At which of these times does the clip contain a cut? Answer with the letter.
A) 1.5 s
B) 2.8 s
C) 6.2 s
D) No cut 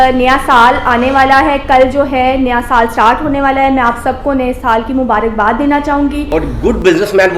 C